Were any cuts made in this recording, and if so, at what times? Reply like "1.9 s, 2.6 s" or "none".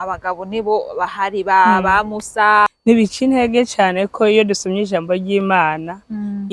2.7 s